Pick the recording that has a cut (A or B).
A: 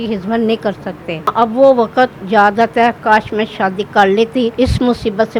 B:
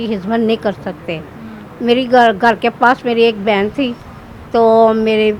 A